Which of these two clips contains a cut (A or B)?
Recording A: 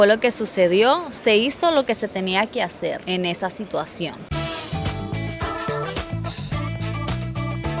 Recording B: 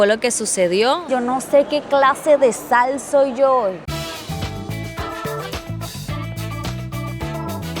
B